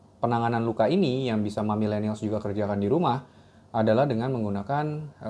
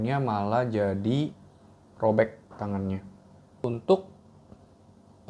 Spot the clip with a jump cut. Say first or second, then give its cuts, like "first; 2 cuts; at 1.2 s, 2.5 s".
second; 1 cut; at 3.6 s